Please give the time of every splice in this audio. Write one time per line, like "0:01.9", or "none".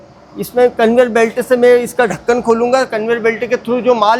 none

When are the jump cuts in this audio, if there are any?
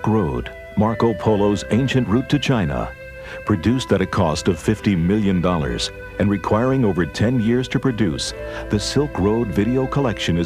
0:04.8

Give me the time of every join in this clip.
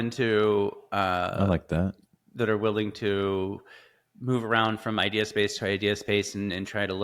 none

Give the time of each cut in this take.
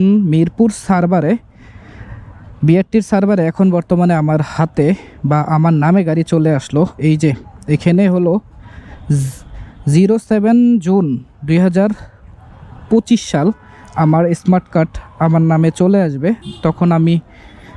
none

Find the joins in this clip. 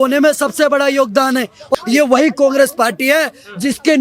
0:01.7

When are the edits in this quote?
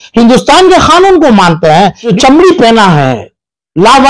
0:02.1

